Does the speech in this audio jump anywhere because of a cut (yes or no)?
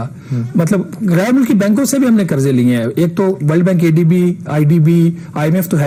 no